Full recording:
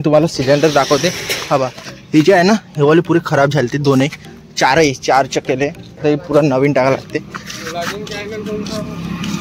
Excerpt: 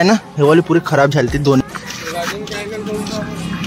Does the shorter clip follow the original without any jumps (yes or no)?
no